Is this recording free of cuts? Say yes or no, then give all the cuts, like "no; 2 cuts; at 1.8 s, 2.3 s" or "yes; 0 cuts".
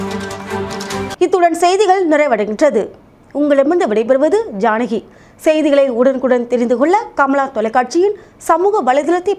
yes; 0 cuts